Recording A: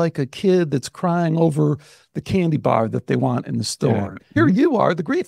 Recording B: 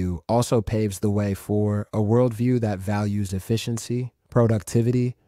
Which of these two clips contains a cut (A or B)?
A